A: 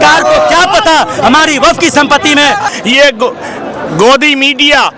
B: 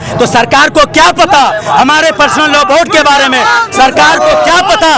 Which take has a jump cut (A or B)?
A